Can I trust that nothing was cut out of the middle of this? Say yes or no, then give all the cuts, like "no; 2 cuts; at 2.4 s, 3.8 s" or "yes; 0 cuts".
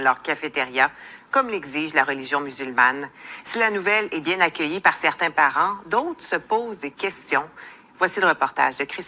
no; 1 cut; at 3.8 s